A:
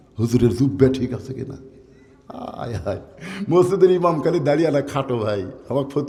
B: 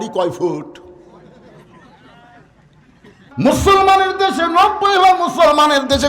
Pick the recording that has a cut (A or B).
B